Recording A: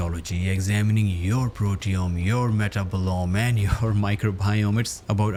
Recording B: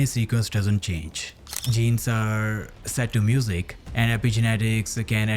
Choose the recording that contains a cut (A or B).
B